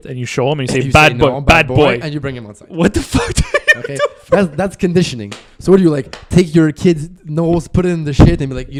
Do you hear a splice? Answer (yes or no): no